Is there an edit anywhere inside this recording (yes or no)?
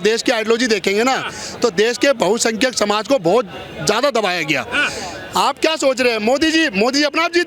no